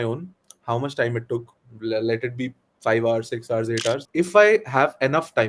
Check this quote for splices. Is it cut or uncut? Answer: cut